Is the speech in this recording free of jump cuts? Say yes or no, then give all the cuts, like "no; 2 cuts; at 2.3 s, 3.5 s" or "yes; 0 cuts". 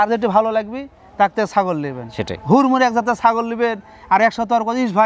yes; 0 cuts